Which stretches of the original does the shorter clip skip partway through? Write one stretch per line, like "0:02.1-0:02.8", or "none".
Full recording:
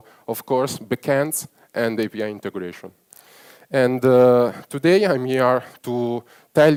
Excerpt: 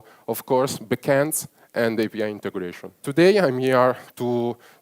0:03.0-0:04.6